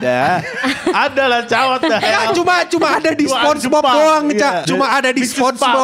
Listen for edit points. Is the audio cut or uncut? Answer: cut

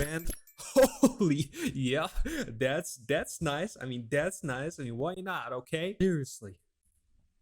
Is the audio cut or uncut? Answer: cut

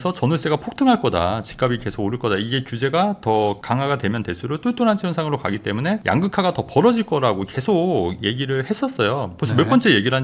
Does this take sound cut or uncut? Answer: uncut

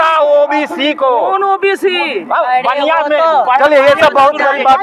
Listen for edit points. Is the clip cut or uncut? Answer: uncut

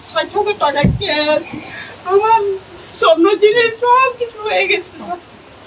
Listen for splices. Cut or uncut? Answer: uncut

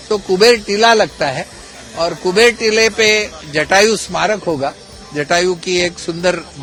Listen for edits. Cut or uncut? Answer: uncut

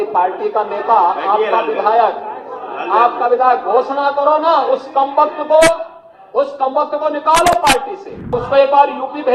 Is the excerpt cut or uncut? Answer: cut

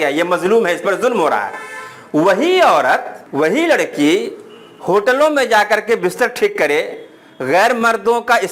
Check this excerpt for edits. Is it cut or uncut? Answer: cut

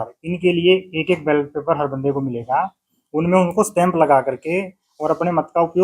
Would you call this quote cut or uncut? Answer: uncut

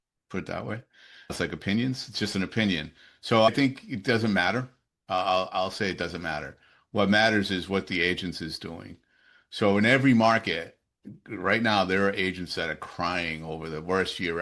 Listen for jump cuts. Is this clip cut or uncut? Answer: cut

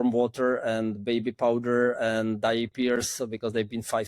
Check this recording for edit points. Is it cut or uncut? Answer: uncut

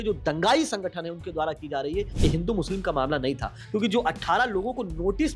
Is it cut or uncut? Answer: cut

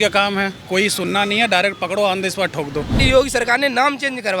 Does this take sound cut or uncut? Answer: cut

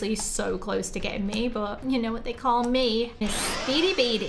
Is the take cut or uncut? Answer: cut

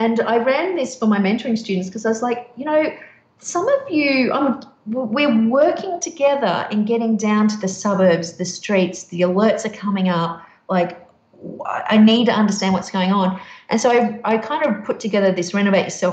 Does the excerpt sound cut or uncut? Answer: uncut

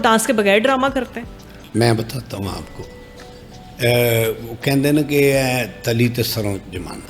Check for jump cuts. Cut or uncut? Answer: uncut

